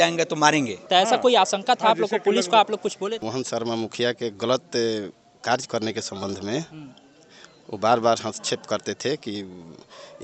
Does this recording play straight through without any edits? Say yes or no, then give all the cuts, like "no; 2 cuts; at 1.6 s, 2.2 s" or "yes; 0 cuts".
no; 2 cuts; at 0.8 s, 3.2 s